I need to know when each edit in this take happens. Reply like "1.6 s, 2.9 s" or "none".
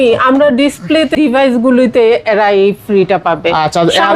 1.1 s